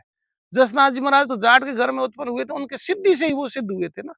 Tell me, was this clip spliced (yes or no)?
no